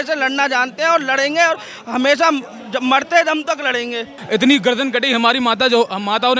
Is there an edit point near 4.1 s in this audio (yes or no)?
yes